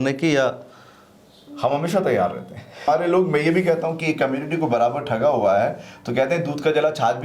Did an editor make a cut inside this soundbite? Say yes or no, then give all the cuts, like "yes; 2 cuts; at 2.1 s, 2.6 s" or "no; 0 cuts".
yes; 1 cut; at 2.8 s